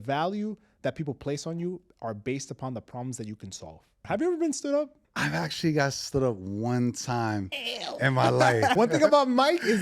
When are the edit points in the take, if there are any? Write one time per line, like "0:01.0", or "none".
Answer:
0:04.0
0:04.9
0:08.8